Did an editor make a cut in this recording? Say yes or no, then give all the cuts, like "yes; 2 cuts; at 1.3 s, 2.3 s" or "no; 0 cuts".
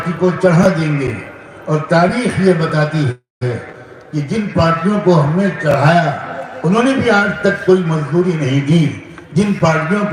no; 0 cuts